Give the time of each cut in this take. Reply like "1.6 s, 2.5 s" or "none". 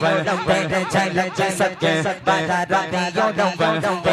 none